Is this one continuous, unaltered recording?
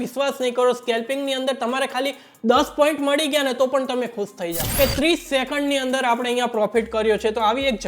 no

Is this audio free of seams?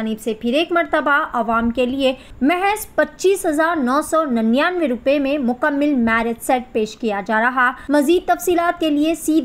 no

